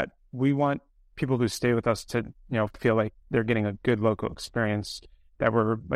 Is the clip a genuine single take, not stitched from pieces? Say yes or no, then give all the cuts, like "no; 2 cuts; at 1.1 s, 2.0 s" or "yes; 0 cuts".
yes; 0 cuts